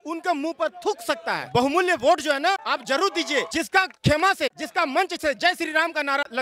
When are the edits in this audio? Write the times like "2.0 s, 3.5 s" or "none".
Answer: 1.4 s, 2.6 s, 3.5 s, 4.6 s